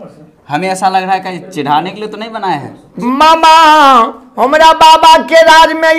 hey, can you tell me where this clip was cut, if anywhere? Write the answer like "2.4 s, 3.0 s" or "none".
2.9 s